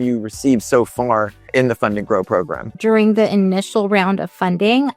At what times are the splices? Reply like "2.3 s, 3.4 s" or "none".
1.5 s, 2.7 s